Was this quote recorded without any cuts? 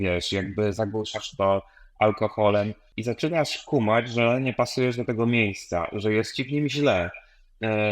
no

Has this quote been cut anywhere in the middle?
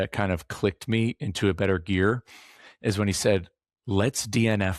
no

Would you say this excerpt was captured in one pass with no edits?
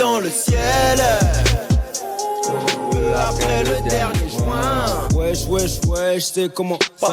yes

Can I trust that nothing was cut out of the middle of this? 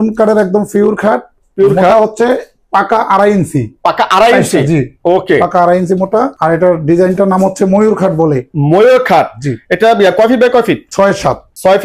yes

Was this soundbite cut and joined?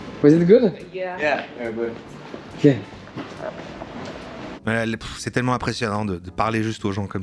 no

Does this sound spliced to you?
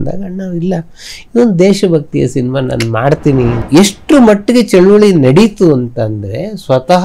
yes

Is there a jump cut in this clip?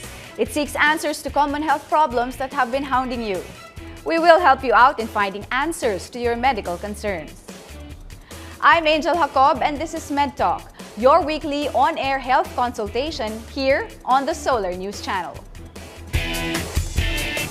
yes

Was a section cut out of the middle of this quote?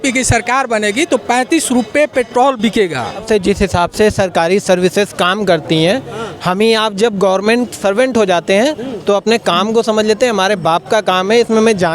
yes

